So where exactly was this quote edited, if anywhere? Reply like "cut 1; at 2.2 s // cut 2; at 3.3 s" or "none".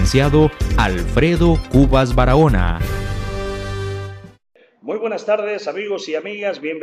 none

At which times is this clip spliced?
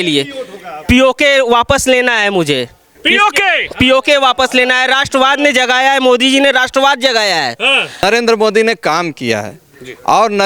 cut 1; at 8.0 s

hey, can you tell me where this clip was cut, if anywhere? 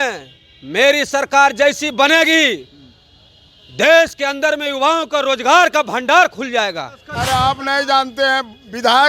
cut 1; at 0.9 s // cut 2; at 7.3 s

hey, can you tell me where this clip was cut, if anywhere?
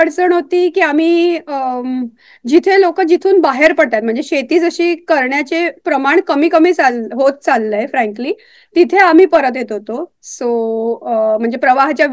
none

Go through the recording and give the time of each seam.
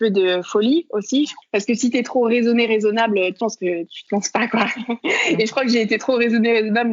cut 1; at 1.4 s // cut 2; at 3.5 s

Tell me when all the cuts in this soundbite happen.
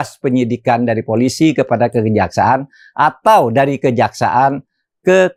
none

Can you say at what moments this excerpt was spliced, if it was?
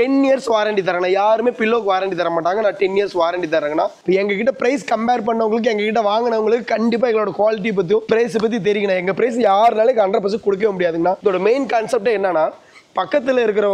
cut 1; at 4.0 s // cut 2; at 8.0 s // cut 3; at 11.2 s

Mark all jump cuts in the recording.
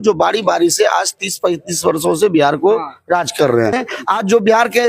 cut 1; at 3.9 s

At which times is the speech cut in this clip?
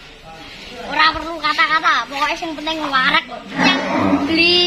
cut 1; at 3.6 s

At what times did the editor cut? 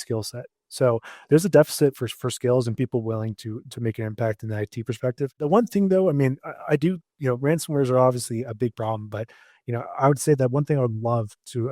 cut 1; at 5.5 s

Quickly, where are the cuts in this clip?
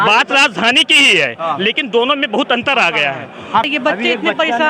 cut 1; at 3.6 s

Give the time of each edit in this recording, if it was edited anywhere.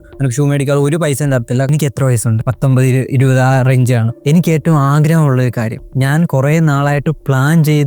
cut 1; at 1.7 s // cut 2; at 4.1 s

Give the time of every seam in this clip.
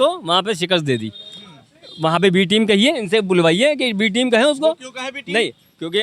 none

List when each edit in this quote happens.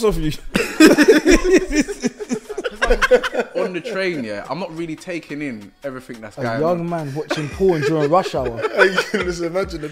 cut 1; at 2.8 s

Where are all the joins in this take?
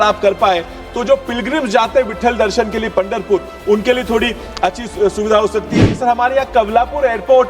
cut 1; at 5.8 s

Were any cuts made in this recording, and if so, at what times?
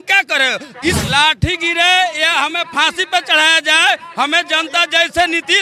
cut 1; at 1.0 s

